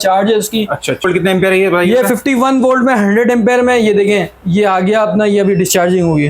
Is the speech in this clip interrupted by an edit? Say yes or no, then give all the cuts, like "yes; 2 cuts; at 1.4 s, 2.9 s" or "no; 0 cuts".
yes; 1 cut; at 1.0 s